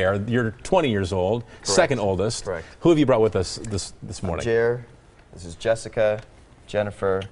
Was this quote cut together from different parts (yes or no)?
no